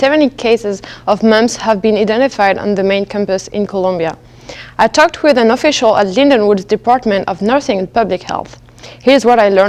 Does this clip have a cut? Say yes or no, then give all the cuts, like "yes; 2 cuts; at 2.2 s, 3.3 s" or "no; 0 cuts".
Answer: no; 0 cuts